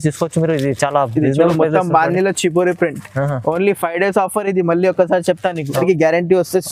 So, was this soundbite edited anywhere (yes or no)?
yes